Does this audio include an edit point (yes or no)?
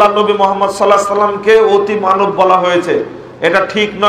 no